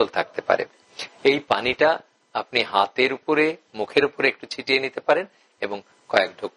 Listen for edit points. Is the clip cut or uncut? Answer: uncut